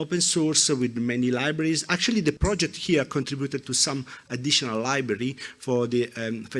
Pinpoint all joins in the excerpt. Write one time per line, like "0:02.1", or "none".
0:02.4

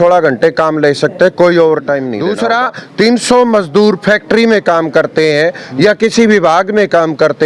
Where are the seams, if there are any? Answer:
0:02.1

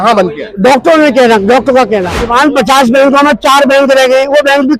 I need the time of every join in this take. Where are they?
0:02.1

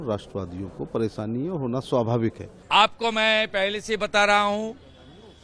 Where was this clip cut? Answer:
0:02.5

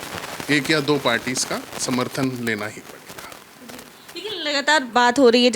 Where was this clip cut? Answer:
none

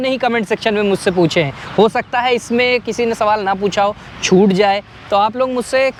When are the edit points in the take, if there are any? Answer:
none

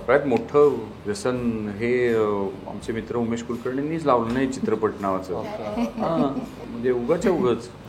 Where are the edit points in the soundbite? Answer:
0:00.9
0:06.6

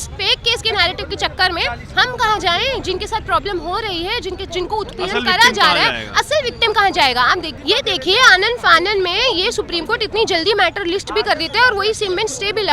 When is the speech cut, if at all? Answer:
0:07.5

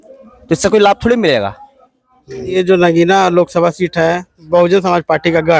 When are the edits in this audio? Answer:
0:02.5

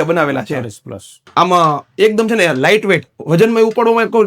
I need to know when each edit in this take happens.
0:01.2

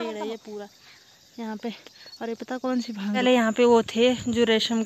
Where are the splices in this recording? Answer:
0:03.2

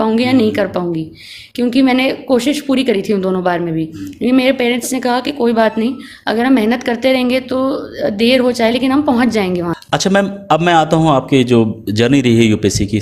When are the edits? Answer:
none

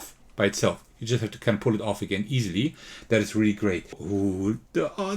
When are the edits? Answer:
0:04.0

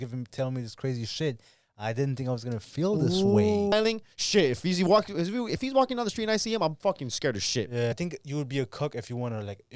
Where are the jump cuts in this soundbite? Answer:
0:03.7
0:07.9

